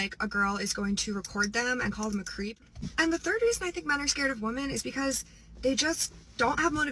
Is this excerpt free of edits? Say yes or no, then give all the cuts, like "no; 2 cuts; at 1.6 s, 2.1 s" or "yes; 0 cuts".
no; 1 cut; at 2.6 s